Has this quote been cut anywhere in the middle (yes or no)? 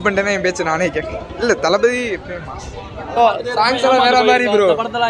no